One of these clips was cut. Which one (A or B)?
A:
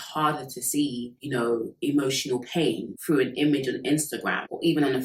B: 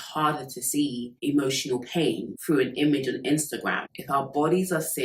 B